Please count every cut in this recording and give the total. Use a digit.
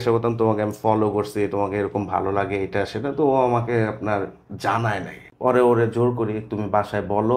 1